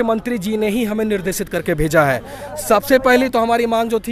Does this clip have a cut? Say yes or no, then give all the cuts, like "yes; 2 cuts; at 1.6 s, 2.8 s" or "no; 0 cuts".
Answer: no; 0 cuts